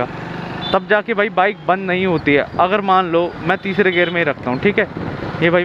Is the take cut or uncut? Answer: uncut